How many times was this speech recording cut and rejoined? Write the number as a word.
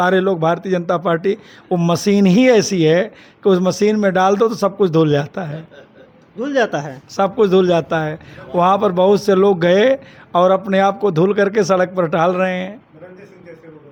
zero